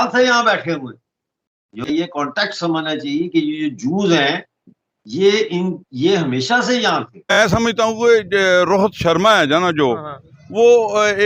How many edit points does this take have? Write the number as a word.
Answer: one